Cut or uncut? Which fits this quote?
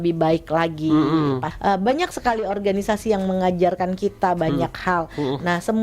cut